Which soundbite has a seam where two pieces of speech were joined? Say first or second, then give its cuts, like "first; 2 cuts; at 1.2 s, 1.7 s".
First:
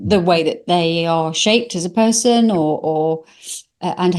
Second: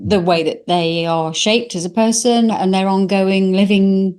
second; 1 cut; at 2.5 s